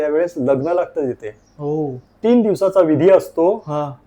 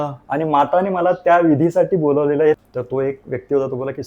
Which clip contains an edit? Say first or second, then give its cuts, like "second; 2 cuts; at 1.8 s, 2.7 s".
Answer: second; 1 cut; at 2.6 s